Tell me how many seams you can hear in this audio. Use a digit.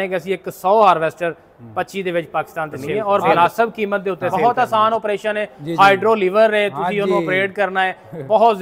2